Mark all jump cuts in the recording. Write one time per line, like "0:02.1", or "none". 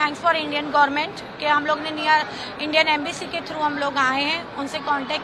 none